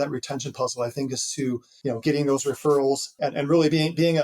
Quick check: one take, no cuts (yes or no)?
no